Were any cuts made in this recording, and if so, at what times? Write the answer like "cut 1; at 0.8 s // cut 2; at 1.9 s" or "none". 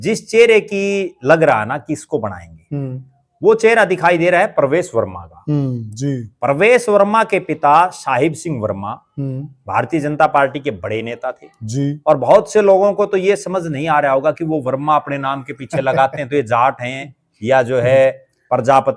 none